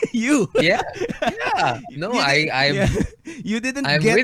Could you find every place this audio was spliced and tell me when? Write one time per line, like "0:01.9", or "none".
none